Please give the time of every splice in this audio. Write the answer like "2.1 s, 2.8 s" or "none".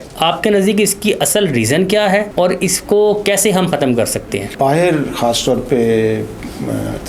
2.3 s, 4.4 s